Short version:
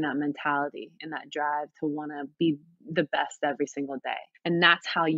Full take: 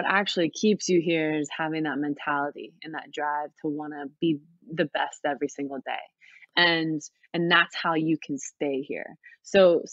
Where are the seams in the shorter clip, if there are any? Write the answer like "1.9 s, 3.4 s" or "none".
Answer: 4.3 s